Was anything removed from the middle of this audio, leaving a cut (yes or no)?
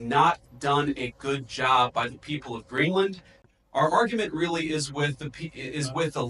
yes